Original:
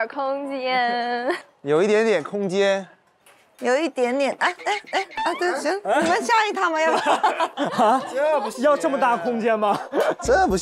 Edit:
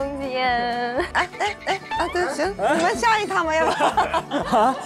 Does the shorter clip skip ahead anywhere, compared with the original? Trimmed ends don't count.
yes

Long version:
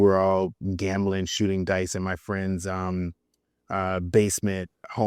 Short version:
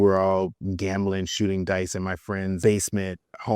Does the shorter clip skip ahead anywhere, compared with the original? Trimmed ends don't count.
yes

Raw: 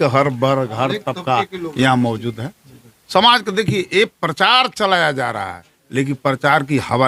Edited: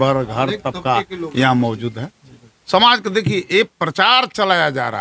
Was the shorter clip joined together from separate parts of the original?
no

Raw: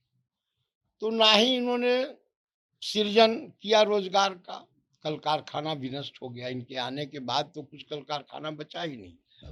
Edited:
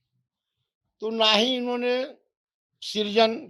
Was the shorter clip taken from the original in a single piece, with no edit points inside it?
yes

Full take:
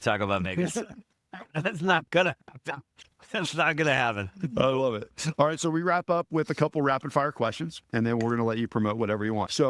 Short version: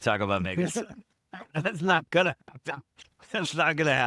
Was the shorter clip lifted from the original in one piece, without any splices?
yes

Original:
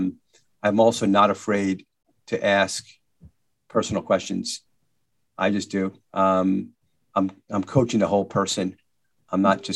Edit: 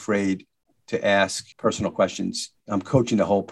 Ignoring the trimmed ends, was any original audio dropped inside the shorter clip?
yes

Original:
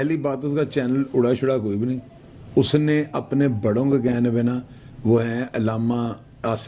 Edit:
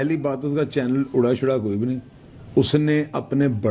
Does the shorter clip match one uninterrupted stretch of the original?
yes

